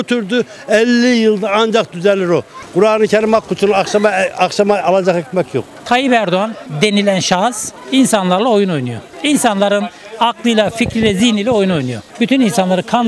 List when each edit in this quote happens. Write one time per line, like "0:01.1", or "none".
0:02.6
0:05.7